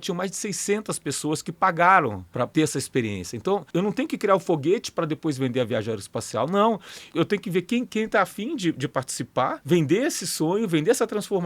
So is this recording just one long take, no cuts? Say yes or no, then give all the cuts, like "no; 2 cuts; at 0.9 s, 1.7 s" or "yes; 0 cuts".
no; 4 cuts; at 2.4 s, 3.7 s, 7.0 s, 9.6 s